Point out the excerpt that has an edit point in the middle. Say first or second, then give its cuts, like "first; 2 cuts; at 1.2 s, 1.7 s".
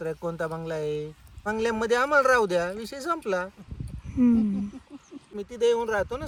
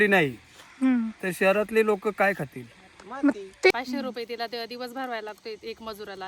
second; 1 cut; at 3.7 s